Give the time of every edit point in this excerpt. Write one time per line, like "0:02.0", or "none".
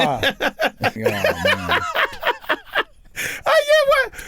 0:01.0